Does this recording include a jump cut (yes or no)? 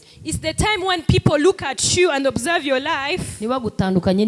no